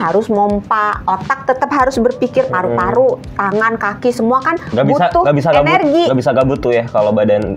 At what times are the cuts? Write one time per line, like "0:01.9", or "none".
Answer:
none